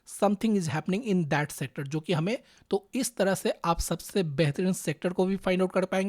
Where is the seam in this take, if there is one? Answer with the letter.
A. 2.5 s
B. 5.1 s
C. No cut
A